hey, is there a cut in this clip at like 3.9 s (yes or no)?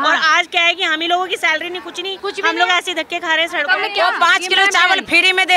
yes